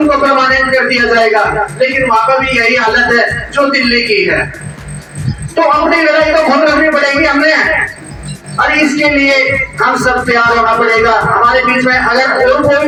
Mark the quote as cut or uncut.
uncut